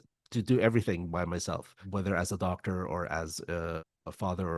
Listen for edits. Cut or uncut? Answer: uncut